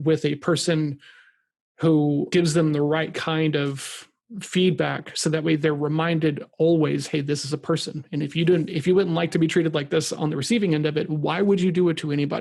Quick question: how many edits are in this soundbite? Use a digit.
1